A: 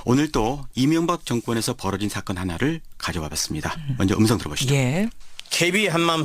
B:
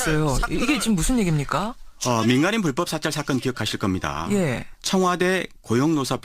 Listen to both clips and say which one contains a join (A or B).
B